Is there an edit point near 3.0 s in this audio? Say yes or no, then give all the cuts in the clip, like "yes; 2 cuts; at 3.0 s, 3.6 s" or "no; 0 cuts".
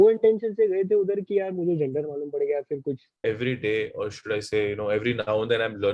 yes; 1 cut; at 3.0 s